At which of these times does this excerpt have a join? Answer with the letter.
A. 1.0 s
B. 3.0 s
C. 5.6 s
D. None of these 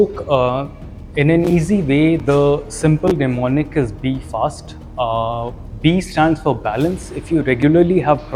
D